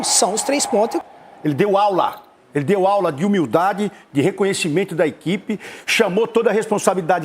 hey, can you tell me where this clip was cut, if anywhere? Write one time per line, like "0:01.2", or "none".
0:01.1